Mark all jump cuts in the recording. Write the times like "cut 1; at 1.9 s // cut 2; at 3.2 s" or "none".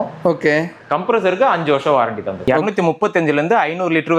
cut 1; at 2.3 s